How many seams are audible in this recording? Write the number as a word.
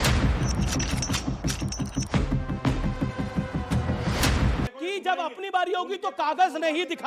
one